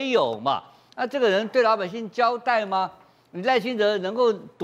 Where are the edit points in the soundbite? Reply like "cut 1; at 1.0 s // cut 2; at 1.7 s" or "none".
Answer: none